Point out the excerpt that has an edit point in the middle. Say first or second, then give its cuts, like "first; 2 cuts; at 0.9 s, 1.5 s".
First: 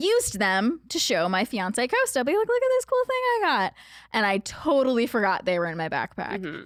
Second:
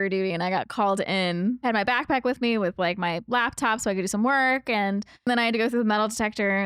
second; 2 cuts; at 1.6 s, 5.3 s